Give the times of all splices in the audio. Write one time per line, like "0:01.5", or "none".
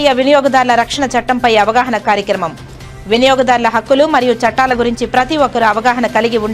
none